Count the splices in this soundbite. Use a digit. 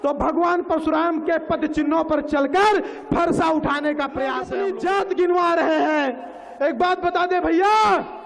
1